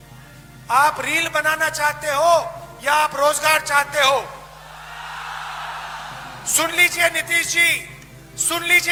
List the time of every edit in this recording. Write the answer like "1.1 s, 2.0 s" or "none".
none